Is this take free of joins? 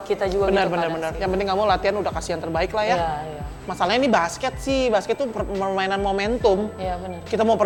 yes; 0 cuts

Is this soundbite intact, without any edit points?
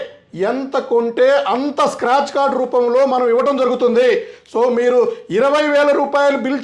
yes; 0 cuts

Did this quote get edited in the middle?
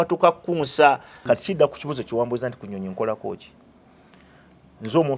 yes; 1 cut; at 1.1 s

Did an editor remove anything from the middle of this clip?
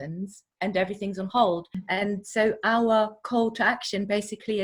yes; 1 cut; at 1.8 s

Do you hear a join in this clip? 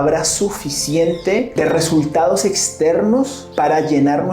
yes; 2 cuts; at 1.5 s, 3.4 s

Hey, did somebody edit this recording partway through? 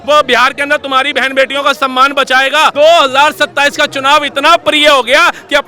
yes; 1 cut; at 2.7 s

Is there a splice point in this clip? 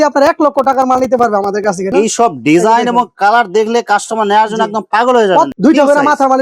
yes; 2 cuts; at 1.9 s, 5.5 s

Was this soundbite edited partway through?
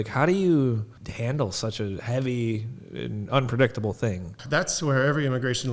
yes; 2 cuts; at 1.0 s, 4.3 s

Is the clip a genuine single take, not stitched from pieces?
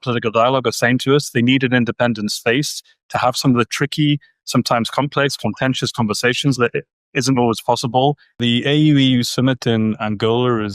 no; 1 cut; at 8.4 s

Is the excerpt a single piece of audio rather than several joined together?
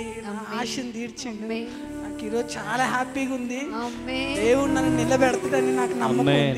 yes; 0 cuts

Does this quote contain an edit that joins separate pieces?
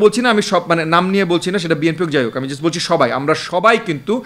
no; 0 cuts

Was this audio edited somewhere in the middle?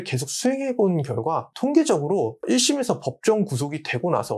yes; 2 cuts; at 1.5 s, 2.4 s

